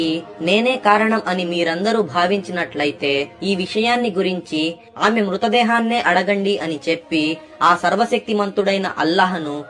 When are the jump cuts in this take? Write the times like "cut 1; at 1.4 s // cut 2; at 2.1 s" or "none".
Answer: none